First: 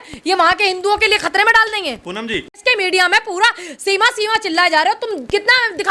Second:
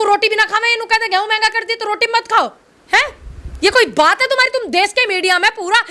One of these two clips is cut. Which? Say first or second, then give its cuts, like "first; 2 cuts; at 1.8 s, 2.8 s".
first; 1 cut; at 2.5 s